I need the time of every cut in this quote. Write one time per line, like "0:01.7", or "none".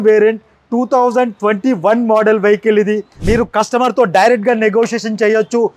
0:03.1